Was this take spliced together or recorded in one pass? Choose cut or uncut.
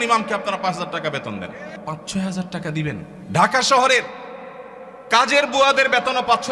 cut